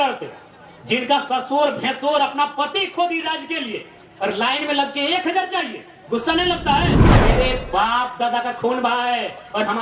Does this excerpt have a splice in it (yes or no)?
yes